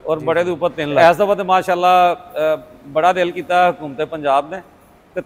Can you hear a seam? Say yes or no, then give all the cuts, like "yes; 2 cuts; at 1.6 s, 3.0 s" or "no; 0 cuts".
yes; 1 cut; at 0.9 s